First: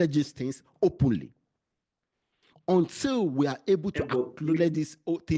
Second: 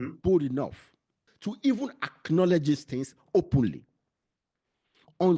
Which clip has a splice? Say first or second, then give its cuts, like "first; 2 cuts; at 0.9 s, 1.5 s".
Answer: second; 1 cut; at 1.3 s